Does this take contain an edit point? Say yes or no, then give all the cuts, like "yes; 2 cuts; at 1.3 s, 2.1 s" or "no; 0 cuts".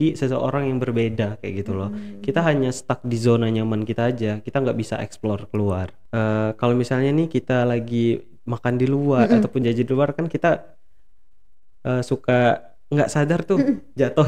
yes; 1 cut; at 6.0 s